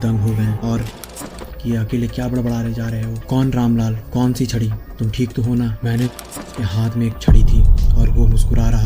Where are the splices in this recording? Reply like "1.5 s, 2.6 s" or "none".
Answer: 1.0 s, 6.4 s